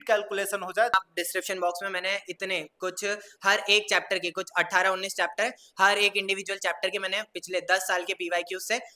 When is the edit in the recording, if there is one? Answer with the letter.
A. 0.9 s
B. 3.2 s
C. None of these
A